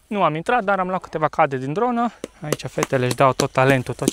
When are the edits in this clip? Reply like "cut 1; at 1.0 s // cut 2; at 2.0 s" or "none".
cut 1; at 2.3 s